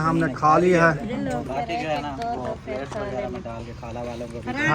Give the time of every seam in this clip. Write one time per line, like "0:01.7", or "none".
0:01.2